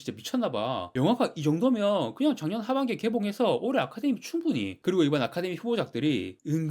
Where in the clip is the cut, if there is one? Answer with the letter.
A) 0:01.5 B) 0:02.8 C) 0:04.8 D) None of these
C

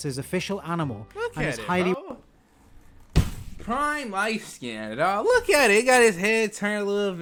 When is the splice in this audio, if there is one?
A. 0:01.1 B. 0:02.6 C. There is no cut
C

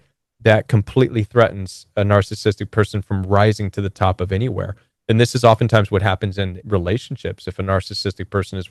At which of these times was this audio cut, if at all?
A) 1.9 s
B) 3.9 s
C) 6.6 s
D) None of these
C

